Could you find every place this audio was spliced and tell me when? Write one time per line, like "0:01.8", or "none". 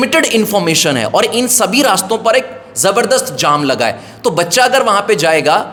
none